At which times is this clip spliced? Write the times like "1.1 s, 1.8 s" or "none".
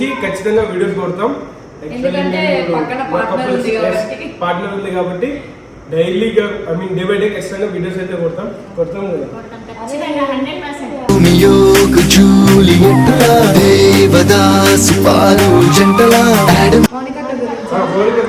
17.0 s